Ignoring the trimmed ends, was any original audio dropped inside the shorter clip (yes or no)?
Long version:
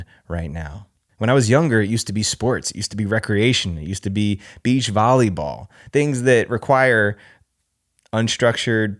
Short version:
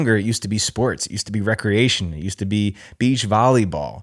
no